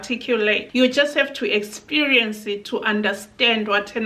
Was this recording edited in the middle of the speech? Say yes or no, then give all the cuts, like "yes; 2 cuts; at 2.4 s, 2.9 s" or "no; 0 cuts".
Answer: no; 0 cuts